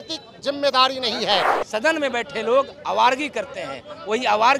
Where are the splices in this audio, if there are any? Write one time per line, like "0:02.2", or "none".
0:01.6